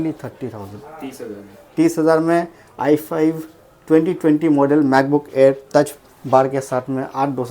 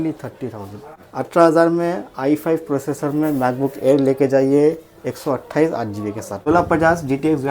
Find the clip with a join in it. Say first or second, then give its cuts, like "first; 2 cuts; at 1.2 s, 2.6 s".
second; 2 cuts; at 0.9 s, 6.5 s